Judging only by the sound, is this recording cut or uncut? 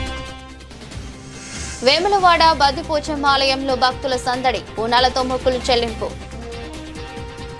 cut